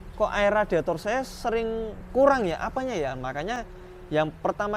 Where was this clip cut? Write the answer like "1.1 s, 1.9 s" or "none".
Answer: none